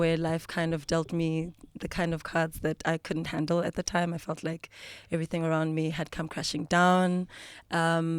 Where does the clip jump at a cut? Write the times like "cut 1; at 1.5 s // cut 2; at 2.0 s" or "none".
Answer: none